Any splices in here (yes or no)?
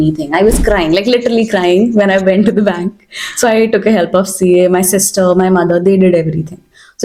no